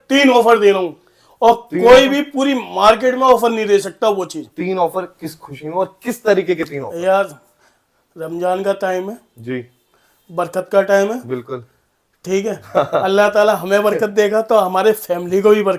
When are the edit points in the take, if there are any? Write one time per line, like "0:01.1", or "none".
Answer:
none